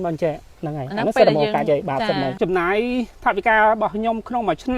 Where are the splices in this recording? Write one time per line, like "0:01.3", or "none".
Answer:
0:02.4